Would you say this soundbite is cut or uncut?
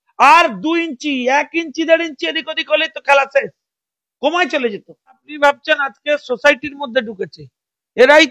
cut